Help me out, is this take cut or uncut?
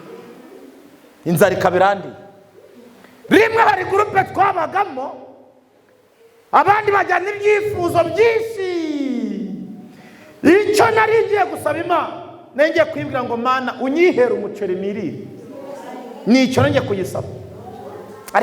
uncut